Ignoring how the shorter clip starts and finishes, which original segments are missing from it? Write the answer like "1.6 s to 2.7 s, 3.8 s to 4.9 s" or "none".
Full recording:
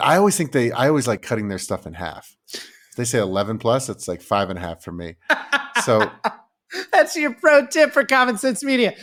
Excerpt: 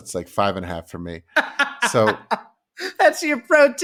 none